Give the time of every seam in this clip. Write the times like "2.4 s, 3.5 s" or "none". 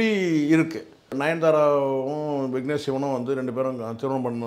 1.2 s